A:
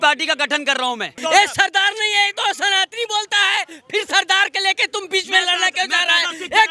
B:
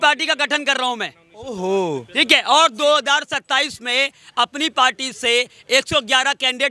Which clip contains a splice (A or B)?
A